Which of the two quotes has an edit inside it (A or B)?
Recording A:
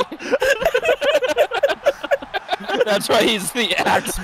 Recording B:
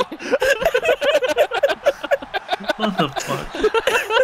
A